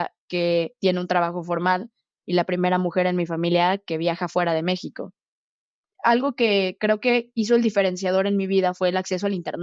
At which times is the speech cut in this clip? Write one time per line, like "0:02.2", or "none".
0:05.9